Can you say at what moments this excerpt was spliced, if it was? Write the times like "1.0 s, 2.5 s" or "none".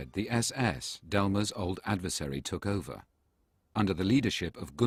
none